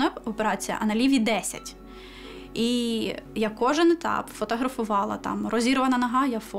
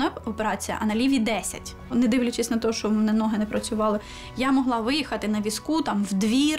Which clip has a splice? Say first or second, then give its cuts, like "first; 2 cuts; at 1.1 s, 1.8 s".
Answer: second; 1 cut; at 1.9 s